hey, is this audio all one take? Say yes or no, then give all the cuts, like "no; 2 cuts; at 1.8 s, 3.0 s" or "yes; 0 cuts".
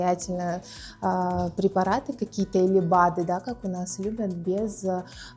yes; 0 cuts